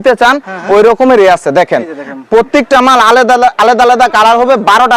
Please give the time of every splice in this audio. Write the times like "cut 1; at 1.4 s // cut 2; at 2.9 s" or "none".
none